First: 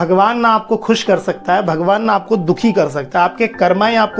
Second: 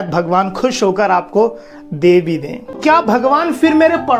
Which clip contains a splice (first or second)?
second